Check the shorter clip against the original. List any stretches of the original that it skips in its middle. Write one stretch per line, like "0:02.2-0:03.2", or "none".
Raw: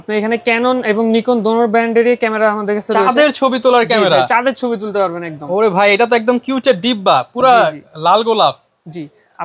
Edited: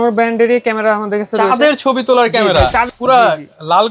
0:04.4-0:07.2